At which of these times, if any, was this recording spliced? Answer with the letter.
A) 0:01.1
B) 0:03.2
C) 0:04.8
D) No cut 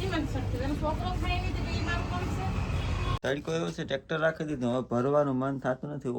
B